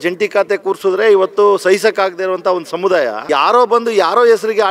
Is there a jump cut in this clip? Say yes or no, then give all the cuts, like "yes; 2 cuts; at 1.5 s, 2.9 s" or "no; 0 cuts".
yes; 1 cut; at 3.2 s